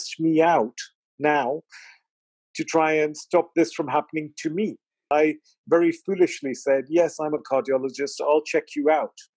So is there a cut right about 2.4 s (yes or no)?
no